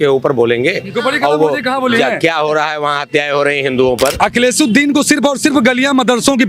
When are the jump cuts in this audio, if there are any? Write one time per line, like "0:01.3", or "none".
0:04.2

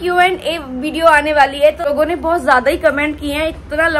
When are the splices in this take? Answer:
0:01.8

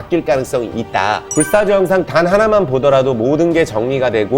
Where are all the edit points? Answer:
0:01.3

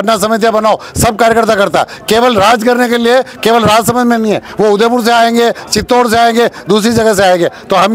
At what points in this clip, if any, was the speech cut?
none

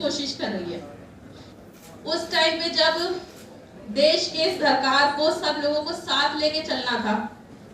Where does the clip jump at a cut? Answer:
0:01.4

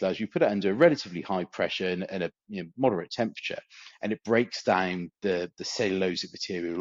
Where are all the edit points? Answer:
none

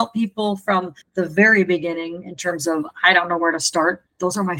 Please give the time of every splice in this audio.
0:01.0

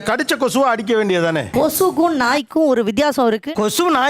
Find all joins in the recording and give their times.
0:01.5

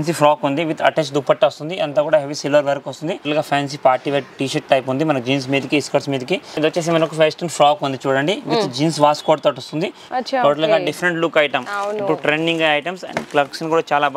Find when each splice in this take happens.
0:03.2
0:06.5
0:10.1

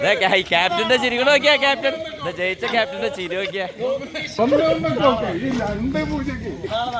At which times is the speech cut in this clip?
0:04.4

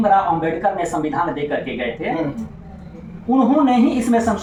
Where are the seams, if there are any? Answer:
none

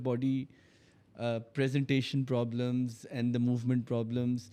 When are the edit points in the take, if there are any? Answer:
none

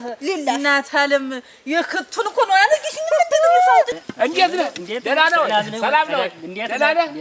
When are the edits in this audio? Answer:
0:03.9

